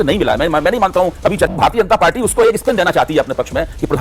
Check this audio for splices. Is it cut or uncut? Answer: cut